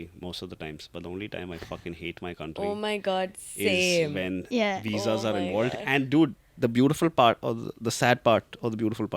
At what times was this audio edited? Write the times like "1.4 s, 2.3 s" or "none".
none